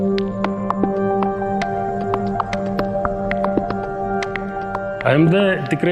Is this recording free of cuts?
yes; 0 cuts

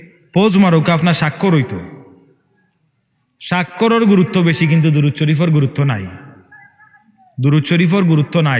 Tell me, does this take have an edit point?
no; 0 cuts

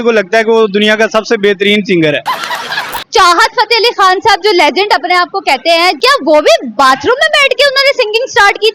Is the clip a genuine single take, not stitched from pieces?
no; 2 cuts; at 2.9 s, 6.0 s

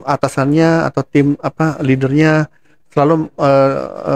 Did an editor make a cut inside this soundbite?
no; 0 cuts

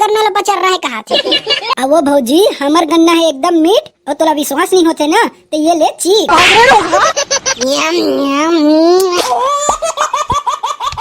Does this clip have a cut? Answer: yes; 1 cut; at 9.2 s

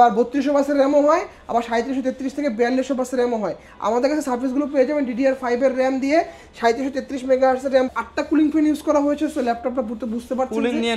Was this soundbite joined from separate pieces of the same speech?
yes; 1 cut; at 7.9 s

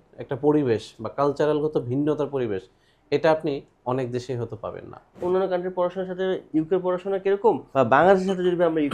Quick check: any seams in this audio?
yes; 3 cuts; at 5.2 s, 6.4 s, 7.6 s

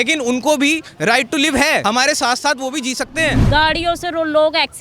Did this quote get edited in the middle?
yes; 2 cuts; at 1.8 s, 3.4 s

